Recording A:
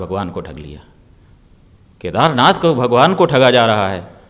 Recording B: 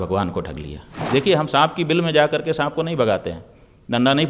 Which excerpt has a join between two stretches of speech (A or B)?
B